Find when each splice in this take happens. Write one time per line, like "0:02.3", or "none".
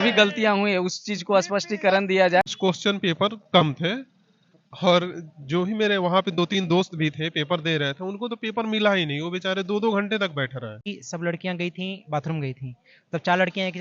0:02.5
0:10.8

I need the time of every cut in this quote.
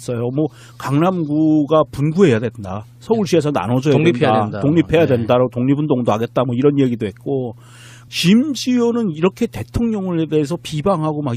0:04.7

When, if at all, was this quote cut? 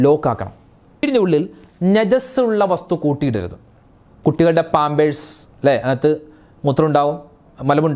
0:01.0

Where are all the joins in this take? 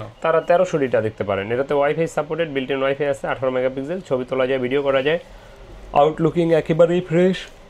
none

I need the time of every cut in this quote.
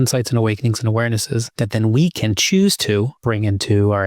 0:01.5
0:03.1

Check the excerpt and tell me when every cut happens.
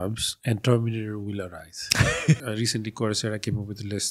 0:02.4

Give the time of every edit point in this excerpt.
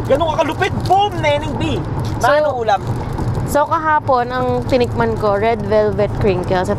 none

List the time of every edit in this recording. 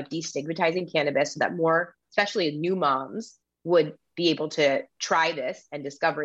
none

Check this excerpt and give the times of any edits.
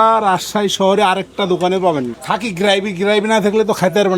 0:02.2

